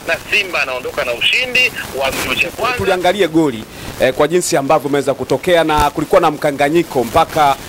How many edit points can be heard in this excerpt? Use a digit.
1